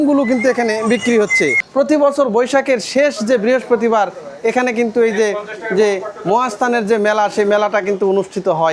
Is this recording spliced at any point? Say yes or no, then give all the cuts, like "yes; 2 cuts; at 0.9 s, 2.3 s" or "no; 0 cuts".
yes; 1 cut; at 1.6 s